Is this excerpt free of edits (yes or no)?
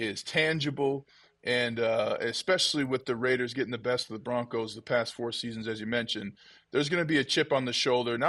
yes